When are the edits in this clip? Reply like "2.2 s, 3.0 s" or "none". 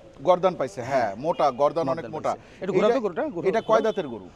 none

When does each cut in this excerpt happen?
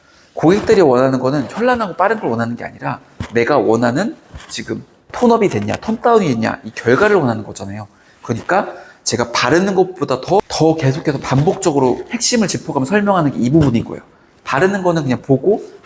10.4 s

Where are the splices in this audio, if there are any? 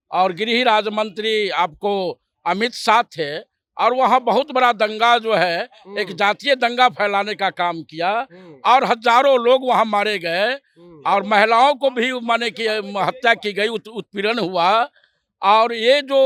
none

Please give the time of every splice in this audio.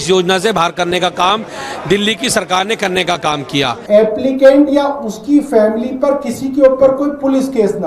3.8 s

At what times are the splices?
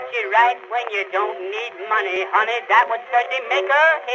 2.1 s

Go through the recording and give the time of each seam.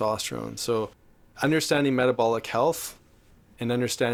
none

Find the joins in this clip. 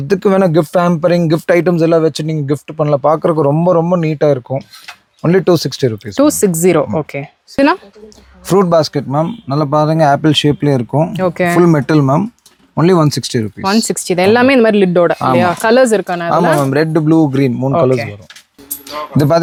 none

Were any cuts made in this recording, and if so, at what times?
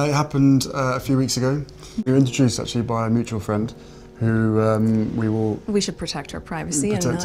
2.0 s

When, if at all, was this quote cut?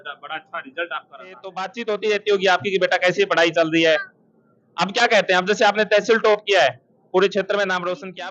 1.7 s

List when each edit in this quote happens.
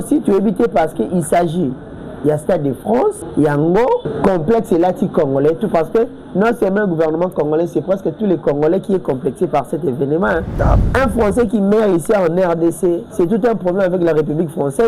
3.2 s, 4.1 s, 10.8 s, 13.1 s

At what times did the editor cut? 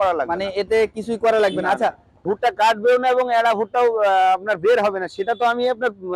2.2 s

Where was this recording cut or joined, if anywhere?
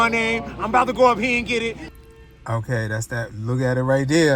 1.9 s

